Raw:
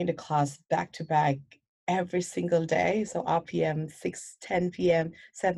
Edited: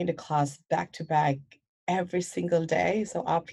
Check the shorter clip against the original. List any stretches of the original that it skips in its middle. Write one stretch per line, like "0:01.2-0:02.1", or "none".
none